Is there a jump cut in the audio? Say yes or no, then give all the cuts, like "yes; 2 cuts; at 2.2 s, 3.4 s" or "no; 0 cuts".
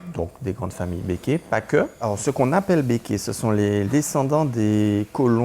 yes; 2 cuts; at 2.0 s, 3.9 s